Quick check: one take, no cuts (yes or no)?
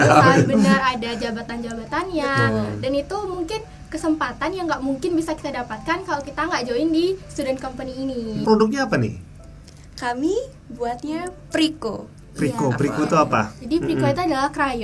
no